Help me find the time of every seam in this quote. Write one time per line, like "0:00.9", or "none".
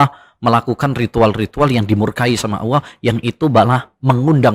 none